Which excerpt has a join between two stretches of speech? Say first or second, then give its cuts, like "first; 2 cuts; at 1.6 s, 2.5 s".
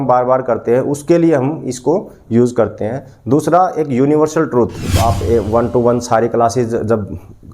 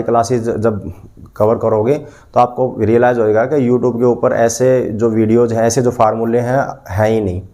first; 1 cut; at 4.9 s